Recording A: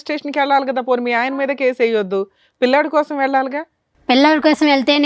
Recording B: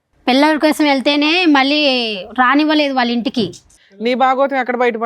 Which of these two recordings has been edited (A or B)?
B